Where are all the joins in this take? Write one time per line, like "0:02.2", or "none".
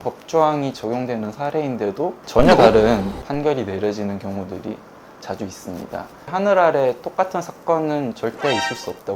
0:02.2
0:03.2
0:06.3